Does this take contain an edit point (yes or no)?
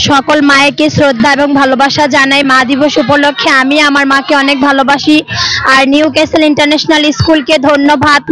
no